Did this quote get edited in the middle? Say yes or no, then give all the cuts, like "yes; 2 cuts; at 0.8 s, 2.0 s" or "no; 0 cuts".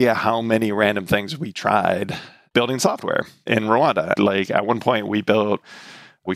no; 0 cuts